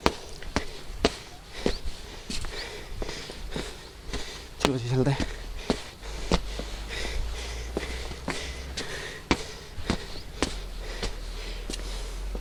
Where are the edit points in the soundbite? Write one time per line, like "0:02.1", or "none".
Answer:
none